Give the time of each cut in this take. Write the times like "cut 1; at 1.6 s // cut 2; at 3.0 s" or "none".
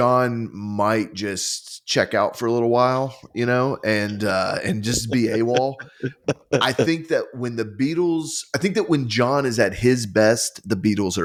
none